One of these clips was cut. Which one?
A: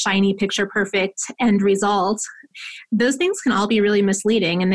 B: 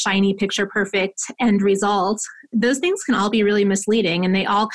B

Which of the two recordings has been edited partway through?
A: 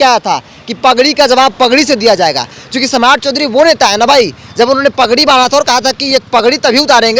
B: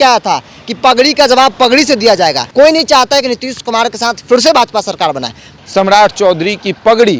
B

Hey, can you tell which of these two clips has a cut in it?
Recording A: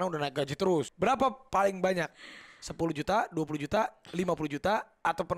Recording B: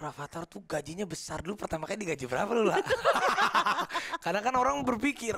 A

